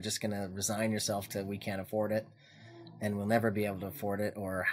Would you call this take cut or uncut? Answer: uncut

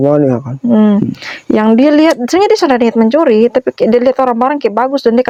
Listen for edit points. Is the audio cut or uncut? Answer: uncut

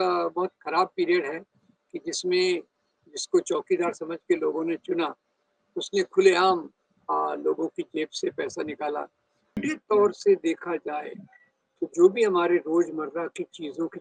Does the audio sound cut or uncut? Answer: cut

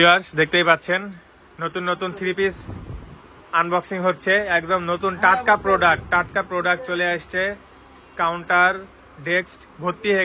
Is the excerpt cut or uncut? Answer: uncut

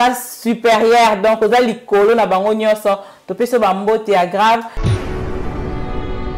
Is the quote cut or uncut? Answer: cut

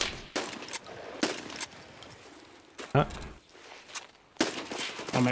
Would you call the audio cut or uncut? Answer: cut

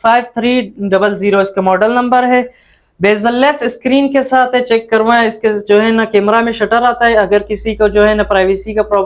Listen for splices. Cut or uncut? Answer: uncut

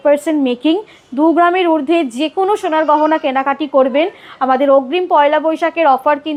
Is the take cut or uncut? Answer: uncut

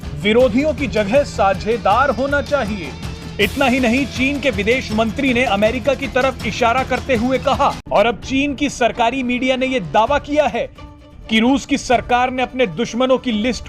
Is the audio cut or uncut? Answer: cut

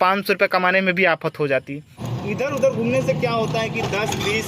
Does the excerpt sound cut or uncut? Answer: cut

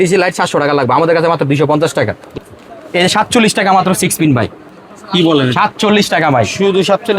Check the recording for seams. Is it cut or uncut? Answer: cut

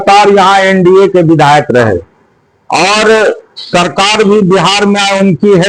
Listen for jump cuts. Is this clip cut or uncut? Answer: uncut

